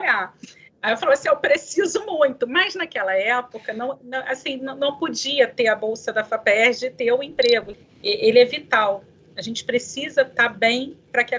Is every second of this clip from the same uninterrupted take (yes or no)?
no